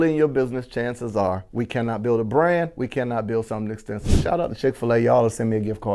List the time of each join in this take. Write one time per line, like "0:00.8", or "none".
none